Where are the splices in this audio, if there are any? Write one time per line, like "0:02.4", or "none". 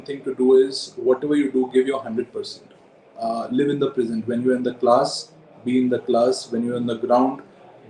none